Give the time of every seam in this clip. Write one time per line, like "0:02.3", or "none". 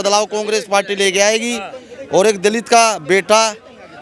none